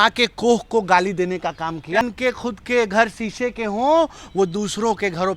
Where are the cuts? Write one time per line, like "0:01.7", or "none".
0:02.0